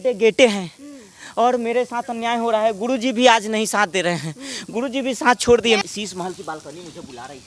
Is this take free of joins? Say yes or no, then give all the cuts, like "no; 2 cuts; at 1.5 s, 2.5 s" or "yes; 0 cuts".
no; 1 cut; at 5.8 s